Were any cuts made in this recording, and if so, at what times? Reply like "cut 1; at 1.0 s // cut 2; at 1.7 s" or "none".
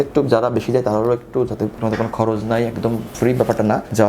cut 1; at 1.8 s

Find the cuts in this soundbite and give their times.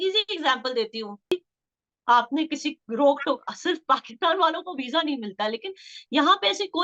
cut 1; at 1.3 s

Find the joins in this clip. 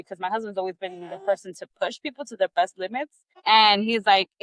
none

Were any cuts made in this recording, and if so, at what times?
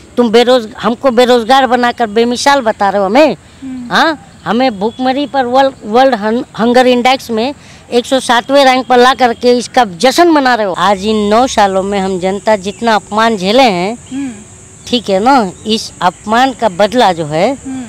cut 1; at 10.7 s

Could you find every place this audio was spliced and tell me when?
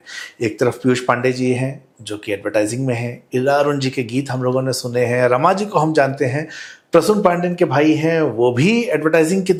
none

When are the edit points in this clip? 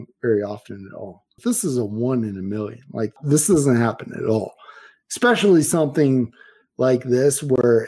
cut 1; at 1.3 s // cut 2; at 3.1 s

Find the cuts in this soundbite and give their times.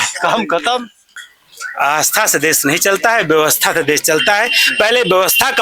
cut 1; at 1.0 s

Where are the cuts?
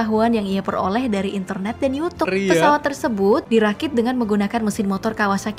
cut 1; at 2.3 s // cut 2; at 3.4 s

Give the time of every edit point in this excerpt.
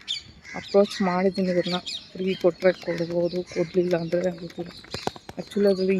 none

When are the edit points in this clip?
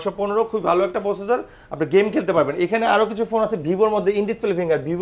none

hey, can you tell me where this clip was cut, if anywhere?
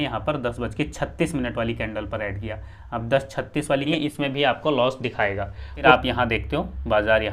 cut 1; at 3.9 s // cut 2; at 5.7 s

